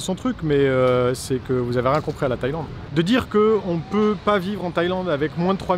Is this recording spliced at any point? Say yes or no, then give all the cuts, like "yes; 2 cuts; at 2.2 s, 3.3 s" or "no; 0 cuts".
yes; 1 cut; at 2.8 s